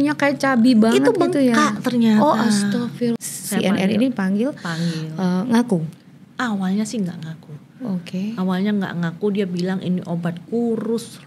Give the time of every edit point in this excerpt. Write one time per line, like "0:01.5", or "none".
0:03.2